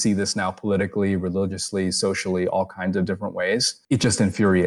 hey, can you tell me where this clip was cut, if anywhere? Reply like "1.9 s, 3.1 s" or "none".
3.7 s